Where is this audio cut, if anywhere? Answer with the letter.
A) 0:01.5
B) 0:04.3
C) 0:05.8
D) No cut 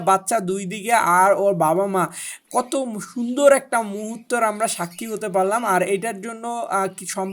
D